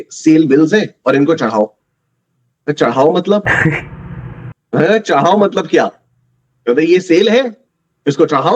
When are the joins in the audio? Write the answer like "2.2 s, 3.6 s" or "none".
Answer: none